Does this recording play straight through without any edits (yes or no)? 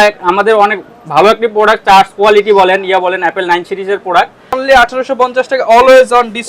no